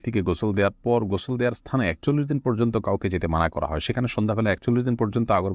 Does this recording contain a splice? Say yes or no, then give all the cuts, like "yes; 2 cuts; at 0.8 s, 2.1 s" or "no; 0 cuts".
no; 0 cuts